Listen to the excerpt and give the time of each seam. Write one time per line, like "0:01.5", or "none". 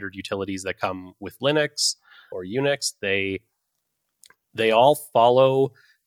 0:02.3